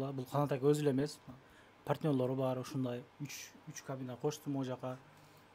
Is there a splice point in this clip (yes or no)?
no